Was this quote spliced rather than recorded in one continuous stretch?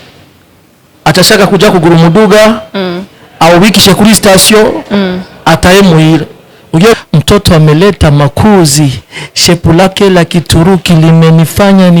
yes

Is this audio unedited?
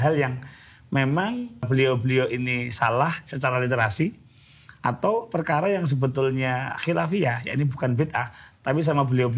no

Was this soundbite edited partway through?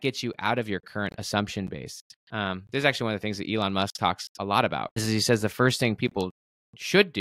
yes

